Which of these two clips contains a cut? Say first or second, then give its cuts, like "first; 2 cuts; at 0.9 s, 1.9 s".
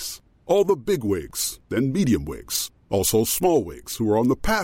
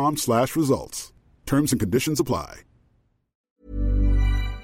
second; 1 cut; at 3.4 s